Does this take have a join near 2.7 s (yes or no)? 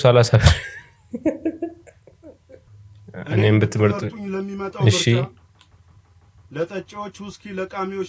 yes